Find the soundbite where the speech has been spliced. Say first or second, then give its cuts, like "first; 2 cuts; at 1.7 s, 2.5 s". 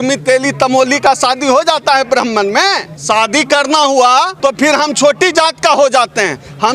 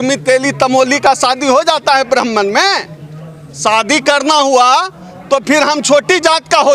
first; 2 cuts; at 2.9 s, 4.3 s